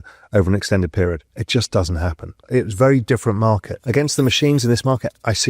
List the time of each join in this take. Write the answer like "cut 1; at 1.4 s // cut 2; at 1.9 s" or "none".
cut 1; at 1.3 s // cut 2; at 2.4 s // cut 3; at 3.7 s